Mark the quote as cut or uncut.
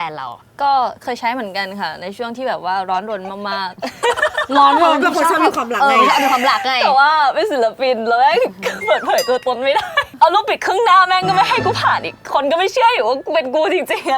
cut